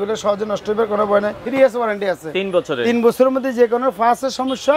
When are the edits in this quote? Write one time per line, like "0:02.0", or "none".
0:01.4